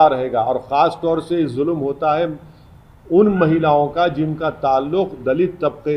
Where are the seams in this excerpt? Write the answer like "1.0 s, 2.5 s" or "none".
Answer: none